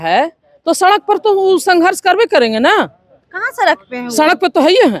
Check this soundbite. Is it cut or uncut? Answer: uncut